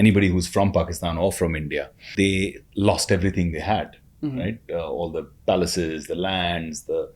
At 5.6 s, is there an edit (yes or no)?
no